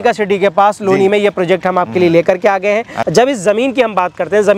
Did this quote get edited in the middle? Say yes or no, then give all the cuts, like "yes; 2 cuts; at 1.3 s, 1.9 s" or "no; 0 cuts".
yes; 1 cut; at 2.9 s